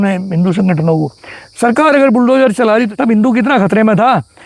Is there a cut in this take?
yes; 1 cut; at 2.9 s

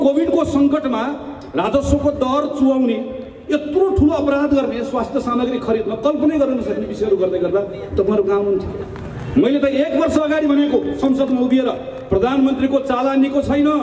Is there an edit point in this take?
no; 0 cuts

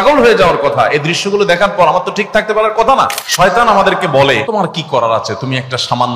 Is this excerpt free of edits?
no; 2 cuts; at 3.2 s, 4.4 s

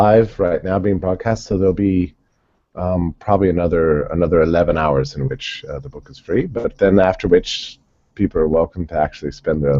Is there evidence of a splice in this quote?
no; 0 cuts

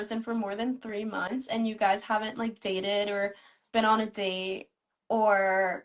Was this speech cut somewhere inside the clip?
no; 0 cuts

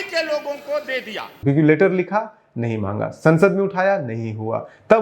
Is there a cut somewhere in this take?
yes; 1 cut; at 1.3 s

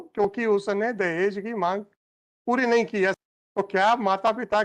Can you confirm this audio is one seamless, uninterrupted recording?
no; 1 cut; at 3.1 s

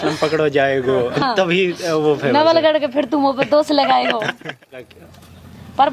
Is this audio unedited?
no; 2 cuts; at 1.2 s, 4.9 s

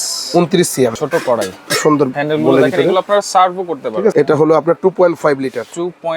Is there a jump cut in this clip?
yes; 2 cuts; at 0.9 s, 4.1 s

